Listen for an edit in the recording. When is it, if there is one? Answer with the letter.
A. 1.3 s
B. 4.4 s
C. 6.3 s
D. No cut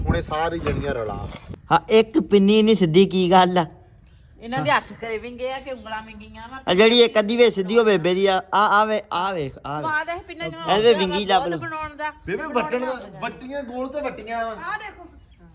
A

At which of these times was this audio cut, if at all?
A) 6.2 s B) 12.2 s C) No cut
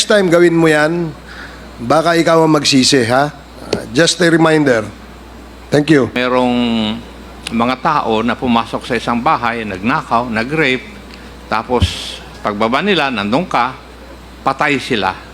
A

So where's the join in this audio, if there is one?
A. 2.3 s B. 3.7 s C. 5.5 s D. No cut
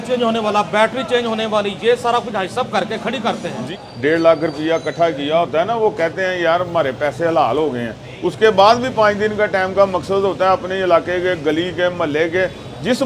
B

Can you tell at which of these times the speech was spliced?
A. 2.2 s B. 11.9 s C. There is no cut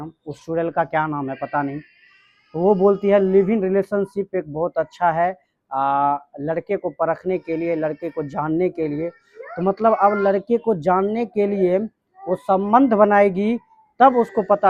C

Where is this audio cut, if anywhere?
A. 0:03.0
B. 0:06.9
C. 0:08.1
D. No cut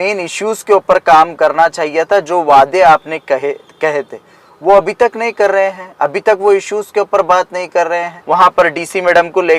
C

